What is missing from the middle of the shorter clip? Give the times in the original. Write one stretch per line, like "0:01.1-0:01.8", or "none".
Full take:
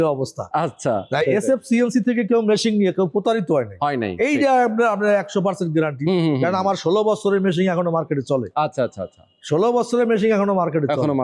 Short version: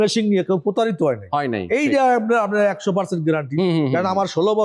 none